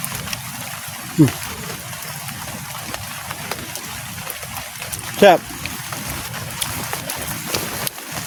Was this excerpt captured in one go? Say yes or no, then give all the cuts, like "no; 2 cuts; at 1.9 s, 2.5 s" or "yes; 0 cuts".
yes; 0 cuts